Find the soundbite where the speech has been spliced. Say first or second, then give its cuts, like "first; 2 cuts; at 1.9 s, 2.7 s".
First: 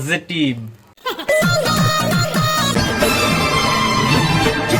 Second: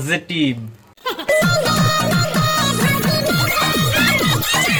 first; 1 cut; at 2.7 s